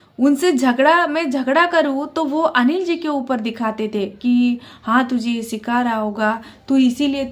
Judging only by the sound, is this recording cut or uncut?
uncut